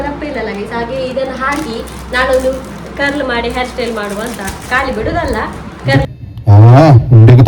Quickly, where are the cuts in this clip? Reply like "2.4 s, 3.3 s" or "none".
6.0 s

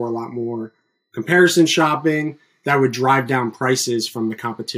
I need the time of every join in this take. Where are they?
none

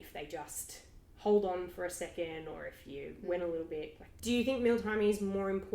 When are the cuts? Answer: 4.0 s

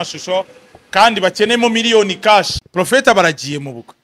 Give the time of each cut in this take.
2.6 s

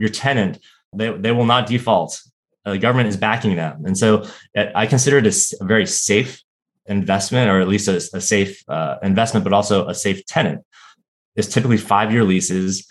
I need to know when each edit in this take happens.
none

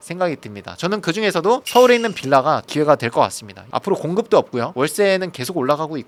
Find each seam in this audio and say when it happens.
none

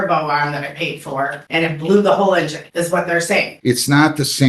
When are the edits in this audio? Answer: 1.4 s, 2.6 s, 3.5 s

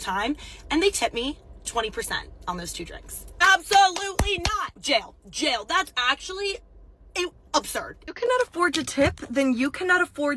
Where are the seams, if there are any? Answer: 4.7 s, 8.0 s

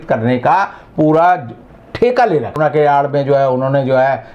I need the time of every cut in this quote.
2.6 s

